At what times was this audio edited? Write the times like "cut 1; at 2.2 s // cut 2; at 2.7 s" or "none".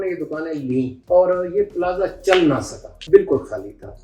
cut 1; at 1.0 s // cut 2; at 2.9 s